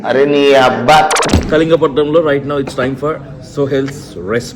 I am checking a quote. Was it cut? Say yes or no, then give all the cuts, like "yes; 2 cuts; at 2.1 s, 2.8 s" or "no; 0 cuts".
yes; 1 cut; at 1.3 s